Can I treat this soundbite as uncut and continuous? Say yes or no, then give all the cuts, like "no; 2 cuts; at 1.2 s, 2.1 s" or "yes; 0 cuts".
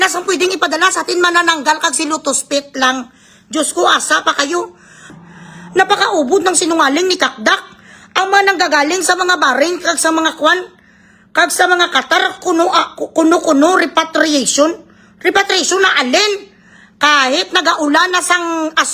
no; 1 cut; at 5.1 s